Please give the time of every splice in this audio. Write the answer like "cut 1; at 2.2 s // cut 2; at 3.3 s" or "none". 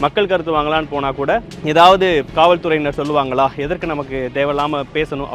cut 1; at 1.5 s

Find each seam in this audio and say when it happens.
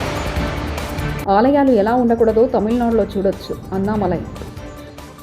cut 1; at 1.1 s

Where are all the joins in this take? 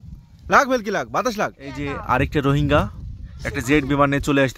cut 1; at 1.9 s

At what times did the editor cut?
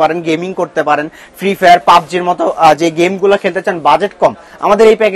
none

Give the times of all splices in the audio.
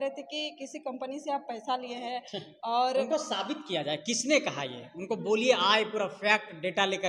none

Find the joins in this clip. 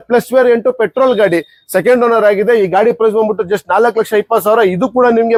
none

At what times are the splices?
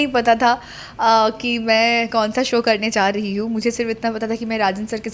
none

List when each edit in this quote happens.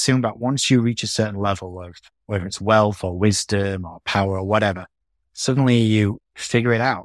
none

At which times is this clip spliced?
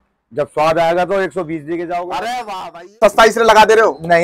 cut 1; at 3.0 s

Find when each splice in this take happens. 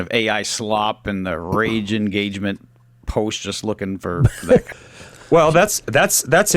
cut 1; at 4.7 s

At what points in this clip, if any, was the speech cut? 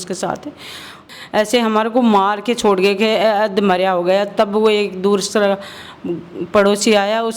cut 1; at 1.0 s

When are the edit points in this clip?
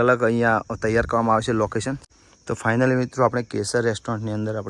cut 1; at 2.0 s

